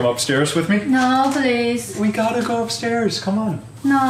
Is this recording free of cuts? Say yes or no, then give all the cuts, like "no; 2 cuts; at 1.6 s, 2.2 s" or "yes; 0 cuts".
yes; 0 cuts